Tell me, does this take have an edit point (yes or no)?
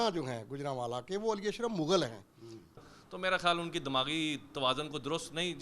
yes